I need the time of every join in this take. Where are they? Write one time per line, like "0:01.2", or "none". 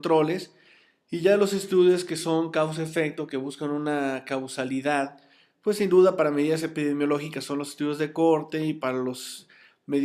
0:09.0